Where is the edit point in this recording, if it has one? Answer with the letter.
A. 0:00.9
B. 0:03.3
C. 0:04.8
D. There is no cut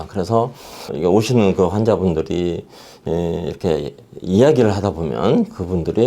A